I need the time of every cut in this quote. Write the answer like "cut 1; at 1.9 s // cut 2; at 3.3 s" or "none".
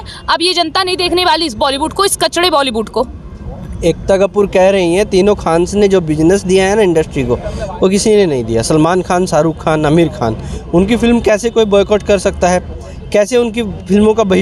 none